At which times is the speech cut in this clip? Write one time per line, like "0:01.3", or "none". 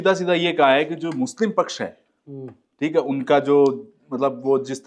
none

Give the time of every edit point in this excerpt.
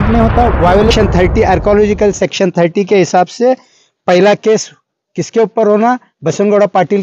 0:00.9

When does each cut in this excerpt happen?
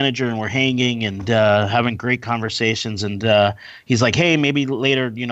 none

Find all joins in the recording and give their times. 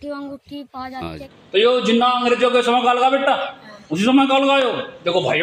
0:01.3

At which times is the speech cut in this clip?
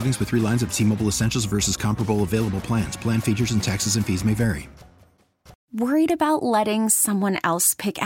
0:05.5

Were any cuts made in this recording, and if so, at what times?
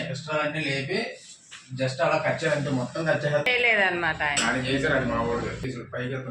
0:03.5
0:05.6

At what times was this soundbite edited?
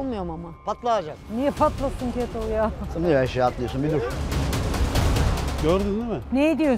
0:05.1

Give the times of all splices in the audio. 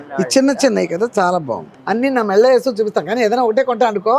0:01.7

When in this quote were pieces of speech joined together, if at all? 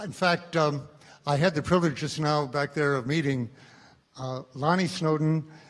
0:03.1

